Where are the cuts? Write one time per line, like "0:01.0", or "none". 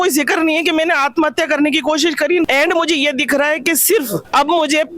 0:02.5